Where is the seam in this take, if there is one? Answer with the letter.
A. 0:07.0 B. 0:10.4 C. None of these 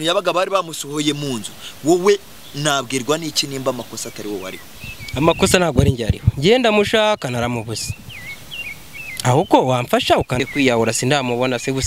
B